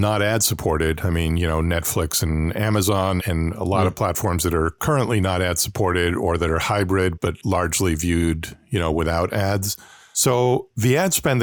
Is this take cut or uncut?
uncut